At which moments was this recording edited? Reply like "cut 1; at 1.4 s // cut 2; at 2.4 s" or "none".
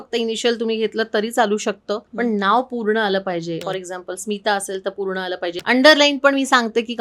cut 1; at 2.1 s // cut 2; at 3.6 s // cut 3; at 5.6 s